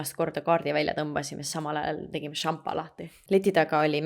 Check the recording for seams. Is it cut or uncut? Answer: cut